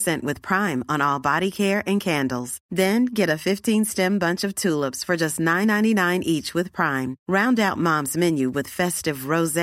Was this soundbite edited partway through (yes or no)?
no